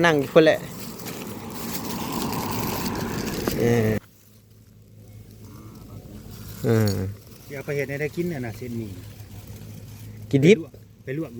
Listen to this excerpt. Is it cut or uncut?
cut